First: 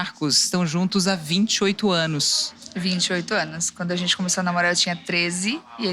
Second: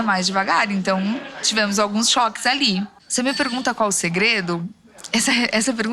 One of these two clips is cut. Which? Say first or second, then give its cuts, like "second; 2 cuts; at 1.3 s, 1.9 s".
second; 1 cut; at 3.0 s